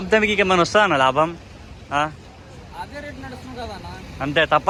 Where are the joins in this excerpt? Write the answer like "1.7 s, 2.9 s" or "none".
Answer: none